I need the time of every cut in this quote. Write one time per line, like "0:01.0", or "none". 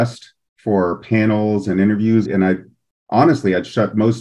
0:02.2